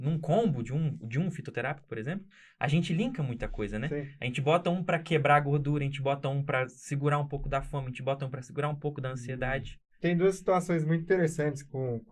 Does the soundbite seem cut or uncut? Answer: uncut